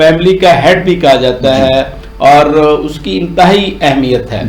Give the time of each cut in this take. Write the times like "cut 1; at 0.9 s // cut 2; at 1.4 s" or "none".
none